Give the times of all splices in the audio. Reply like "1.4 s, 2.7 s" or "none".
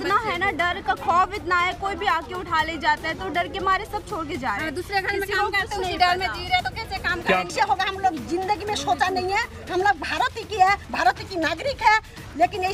7.5 s